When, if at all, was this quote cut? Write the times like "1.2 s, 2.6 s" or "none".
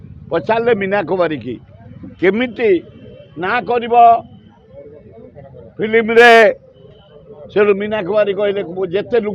none